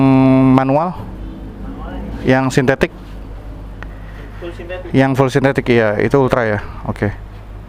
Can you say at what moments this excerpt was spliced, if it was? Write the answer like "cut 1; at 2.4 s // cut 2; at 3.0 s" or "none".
none